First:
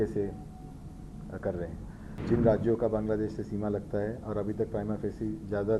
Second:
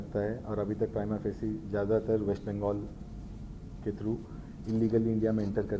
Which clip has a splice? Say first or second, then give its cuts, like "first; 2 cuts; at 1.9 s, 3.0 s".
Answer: first; 1 cut; at 2.2 s